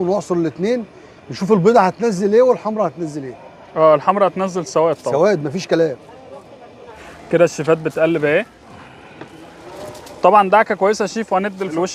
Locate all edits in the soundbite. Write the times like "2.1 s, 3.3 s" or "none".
none